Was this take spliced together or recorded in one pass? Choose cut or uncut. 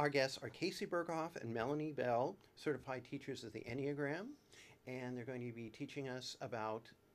uncut